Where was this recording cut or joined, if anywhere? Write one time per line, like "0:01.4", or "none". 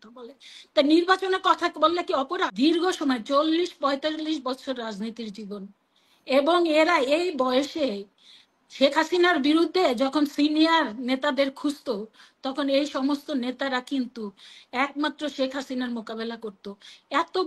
0:02.5